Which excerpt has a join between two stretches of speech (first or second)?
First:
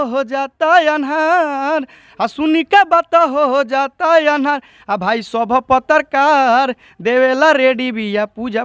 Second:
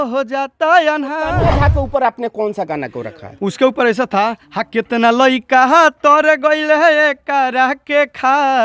second